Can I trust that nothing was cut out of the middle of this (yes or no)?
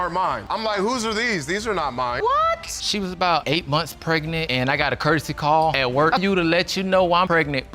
no